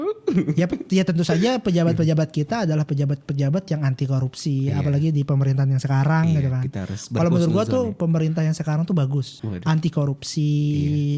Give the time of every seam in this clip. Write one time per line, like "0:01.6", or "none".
none